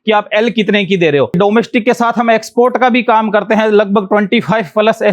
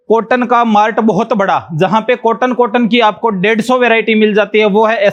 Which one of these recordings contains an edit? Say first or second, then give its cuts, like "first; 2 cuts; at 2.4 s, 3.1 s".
first; 1 cut; at 1.4 s